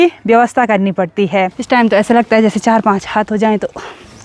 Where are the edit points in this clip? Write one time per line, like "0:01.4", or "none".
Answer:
0:01.6